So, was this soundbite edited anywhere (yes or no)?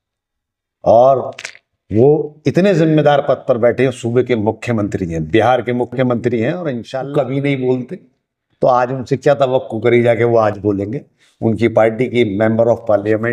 yes